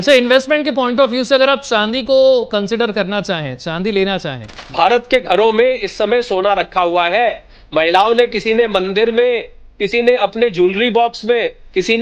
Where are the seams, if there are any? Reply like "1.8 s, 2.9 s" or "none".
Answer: 4.8 s